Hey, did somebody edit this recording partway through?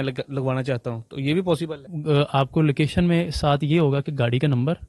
yes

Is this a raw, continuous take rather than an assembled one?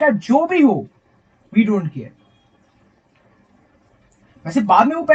yes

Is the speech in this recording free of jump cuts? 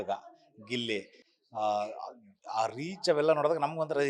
yes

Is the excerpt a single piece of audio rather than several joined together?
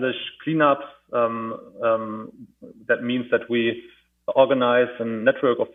yes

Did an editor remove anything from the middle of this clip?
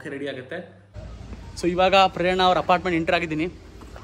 yes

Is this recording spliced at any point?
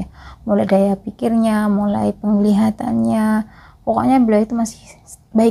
no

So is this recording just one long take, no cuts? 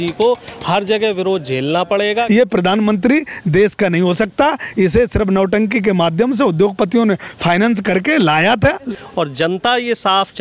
no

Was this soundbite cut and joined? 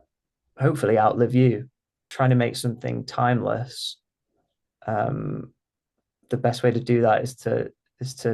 yes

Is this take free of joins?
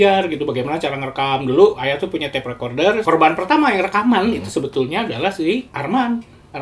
no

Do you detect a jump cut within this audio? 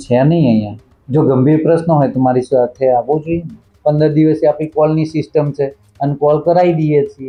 no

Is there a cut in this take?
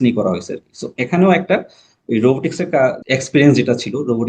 yes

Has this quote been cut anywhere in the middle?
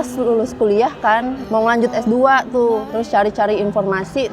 yes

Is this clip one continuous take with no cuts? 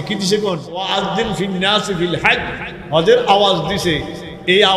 no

